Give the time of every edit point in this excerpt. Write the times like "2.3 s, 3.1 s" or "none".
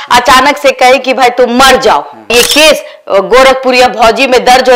2.3 s